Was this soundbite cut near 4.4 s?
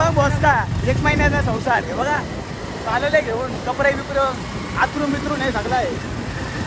no; 0 cuts

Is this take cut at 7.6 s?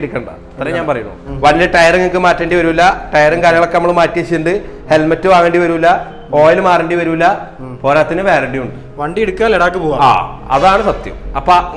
no; 1 cut; at 1.2 s

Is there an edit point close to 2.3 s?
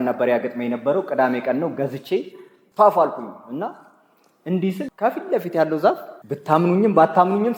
no; 0 cuts

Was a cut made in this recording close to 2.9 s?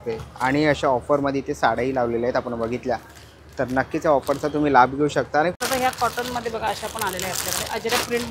no; 1 cut; at 5.5 s

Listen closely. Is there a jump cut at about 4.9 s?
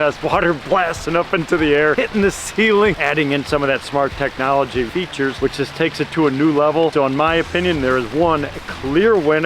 yes; 2 cuts; at 3.0 s, 4.9 s

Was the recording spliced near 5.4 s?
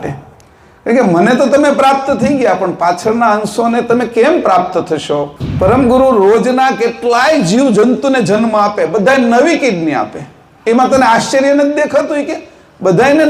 yes; 1 cut; at 5.4 s

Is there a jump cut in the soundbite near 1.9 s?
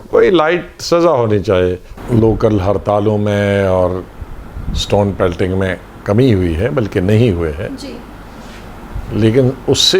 yes; 1 cut; at 1.9 s

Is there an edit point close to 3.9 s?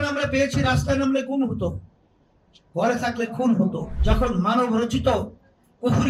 yes; 1 cut; at 3.9 s

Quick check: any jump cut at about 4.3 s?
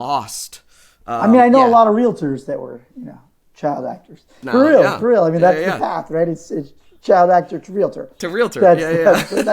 yes; 1 cut; at 4.3 s

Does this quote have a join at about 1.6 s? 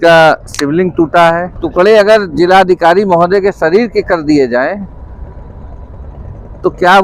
yes; 1 cut; at 1.6 s

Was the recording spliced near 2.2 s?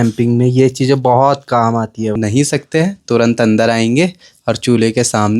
yes; 1 cut; at 2.2 s

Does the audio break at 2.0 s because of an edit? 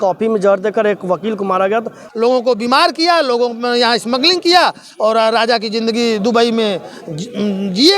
yes; 1 cut; at 2.0 s

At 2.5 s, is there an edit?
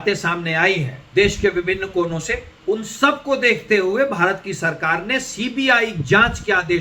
yes; 2 cuts; at 1.0 s, 2.5 s

